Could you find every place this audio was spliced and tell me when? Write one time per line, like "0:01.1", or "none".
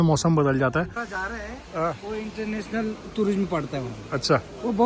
0:01.0

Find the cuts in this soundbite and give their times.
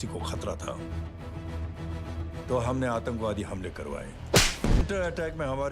0:04.8

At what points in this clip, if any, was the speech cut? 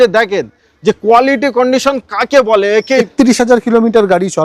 0:03.0

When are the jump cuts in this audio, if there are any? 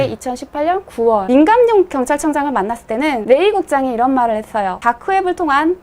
0:01.2
0:03.2
0:04.7

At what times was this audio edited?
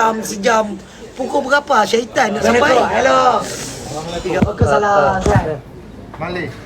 0:02.4

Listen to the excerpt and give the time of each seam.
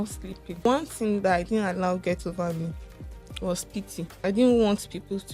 0:00.7
0:04.1

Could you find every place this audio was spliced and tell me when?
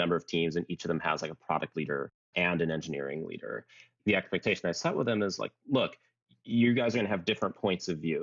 none

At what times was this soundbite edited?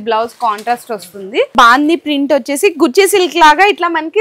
0:01.5

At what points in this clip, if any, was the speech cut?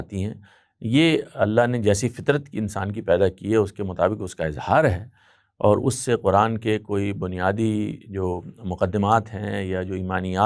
none

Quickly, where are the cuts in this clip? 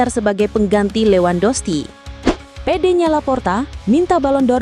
0:02.5

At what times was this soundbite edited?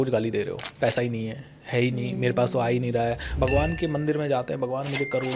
0:03.4

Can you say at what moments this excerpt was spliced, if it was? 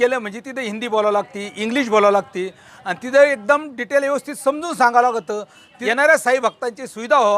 none

